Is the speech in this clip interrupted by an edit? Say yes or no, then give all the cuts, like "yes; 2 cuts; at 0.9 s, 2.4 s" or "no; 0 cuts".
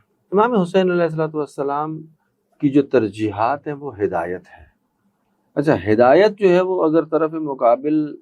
no; 0 cuts